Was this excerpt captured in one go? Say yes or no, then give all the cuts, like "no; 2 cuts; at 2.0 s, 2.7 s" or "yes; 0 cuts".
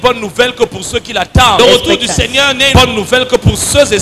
no; 2 cuts; at 1.6 s, 2.7 s